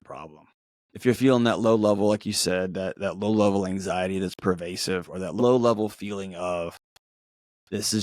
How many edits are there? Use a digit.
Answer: 1